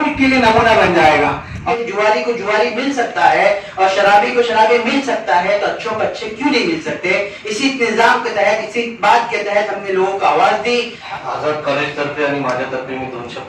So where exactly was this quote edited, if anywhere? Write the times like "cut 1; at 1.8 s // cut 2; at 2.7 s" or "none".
cut 1; at 1.6 s // cut 2; at 11.0 s